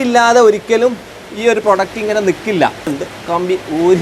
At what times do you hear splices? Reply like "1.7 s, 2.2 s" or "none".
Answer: 2.9 s